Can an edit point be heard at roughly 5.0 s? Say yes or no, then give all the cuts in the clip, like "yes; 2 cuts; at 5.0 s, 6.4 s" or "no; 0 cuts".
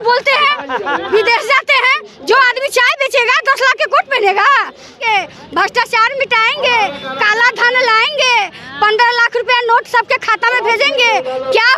yes; 1 cut; at 5.0 s